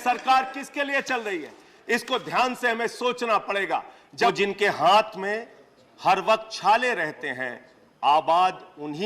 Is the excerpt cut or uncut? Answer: cut